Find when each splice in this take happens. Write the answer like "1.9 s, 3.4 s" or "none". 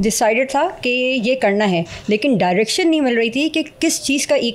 none